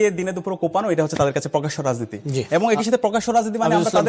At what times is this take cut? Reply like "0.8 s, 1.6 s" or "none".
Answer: none